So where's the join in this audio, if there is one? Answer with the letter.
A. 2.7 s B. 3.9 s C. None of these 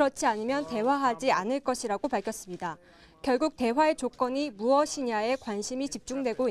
B